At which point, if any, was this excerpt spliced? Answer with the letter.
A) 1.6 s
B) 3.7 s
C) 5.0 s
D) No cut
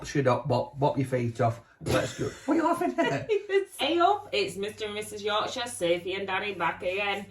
B